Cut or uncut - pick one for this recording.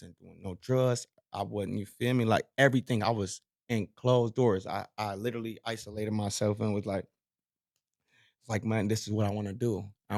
uncut